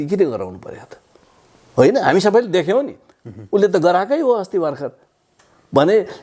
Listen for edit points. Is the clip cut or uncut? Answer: uncut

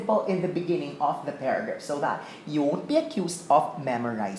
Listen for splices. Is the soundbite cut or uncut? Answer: uncut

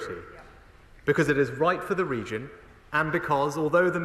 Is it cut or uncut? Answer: uncut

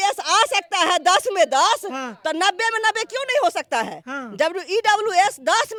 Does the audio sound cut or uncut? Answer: uncut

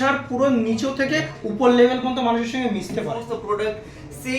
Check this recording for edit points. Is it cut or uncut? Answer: cut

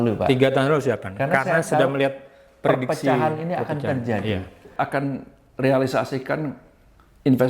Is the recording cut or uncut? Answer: cut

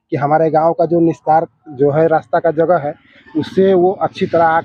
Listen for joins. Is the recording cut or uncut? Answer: uncut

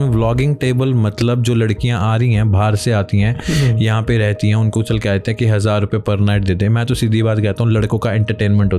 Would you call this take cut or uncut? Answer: uncut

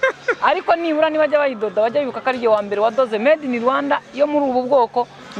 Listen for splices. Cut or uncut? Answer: uncut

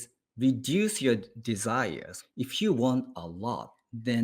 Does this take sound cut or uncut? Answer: cut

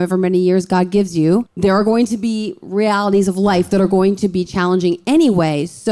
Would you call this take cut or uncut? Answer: cut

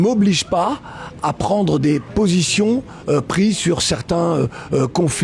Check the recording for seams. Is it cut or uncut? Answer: uncut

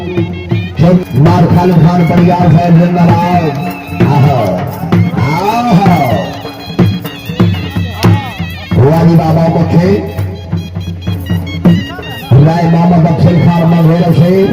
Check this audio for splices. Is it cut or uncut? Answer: cut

